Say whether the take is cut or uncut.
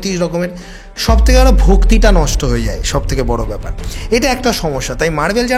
uncut